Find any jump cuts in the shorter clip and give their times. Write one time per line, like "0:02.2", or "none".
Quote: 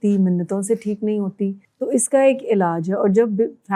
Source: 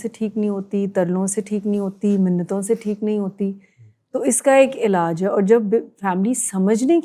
0:01.7